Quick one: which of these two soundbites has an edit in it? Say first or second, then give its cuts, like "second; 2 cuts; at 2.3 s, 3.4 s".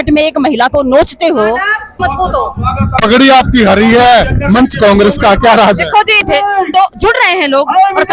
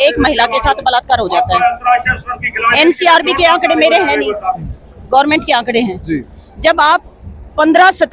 first; 2 cuts; at 1.9 s, 6.2 s